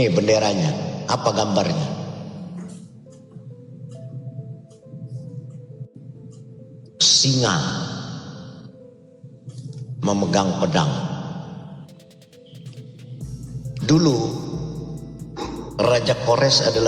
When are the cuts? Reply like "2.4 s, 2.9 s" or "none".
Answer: none